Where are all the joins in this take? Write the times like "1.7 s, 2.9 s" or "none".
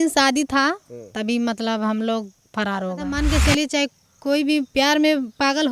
3.1 s